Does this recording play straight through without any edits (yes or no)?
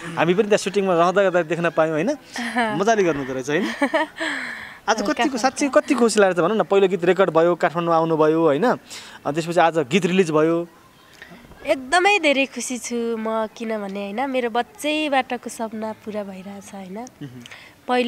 yes